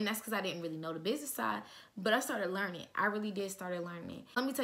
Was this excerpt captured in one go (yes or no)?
yes